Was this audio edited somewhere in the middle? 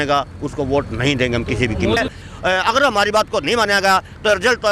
yes; 1 cut; at 2.0 s

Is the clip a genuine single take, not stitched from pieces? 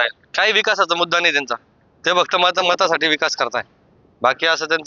yes; 0 cuts

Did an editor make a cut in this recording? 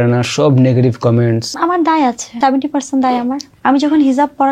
yes; 3 cuts; at 1.5 s, 2.3 s, 3.4 s

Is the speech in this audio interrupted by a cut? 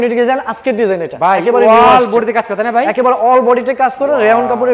no; 0 cuts

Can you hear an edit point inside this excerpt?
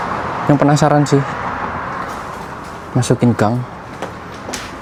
no; 0 cuts

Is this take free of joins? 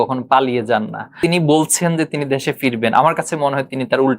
no; 1 cut; at 1.2 s

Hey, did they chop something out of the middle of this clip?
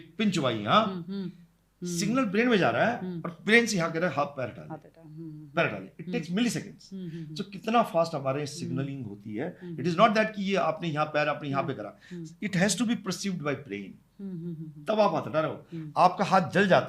no; 0 cuts

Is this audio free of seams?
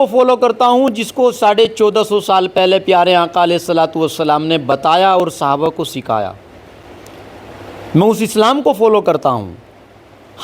yes; 0 cuts

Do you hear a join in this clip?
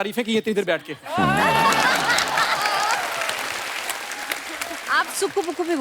yes; 1 cut; at 4.8 s

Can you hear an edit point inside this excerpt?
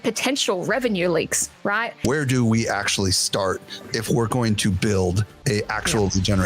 yes; 2 cuts; at 1.9 s, 5.3 s

